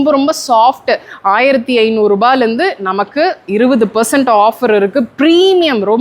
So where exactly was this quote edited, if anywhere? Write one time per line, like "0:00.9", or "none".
none